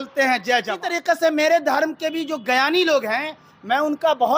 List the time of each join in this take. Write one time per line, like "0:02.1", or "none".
0:00.9